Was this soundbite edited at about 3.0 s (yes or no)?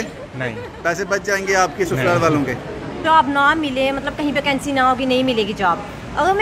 yes